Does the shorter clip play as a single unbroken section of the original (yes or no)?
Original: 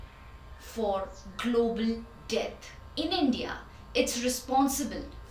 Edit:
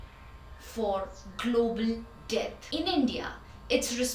no